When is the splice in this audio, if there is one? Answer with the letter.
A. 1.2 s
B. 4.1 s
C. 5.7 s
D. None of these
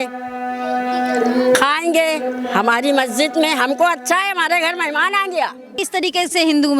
C